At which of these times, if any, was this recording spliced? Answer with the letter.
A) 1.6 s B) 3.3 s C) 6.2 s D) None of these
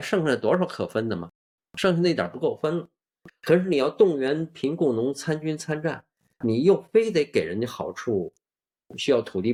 D